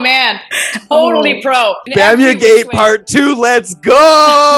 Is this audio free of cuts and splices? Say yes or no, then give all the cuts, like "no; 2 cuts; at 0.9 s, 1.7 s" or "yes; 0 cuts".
no; 1 cut; at 1.8 s